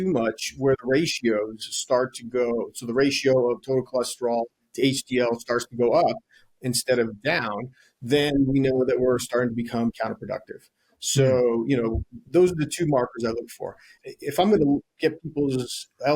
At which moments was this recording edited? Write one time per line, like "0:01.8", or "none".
0:13.9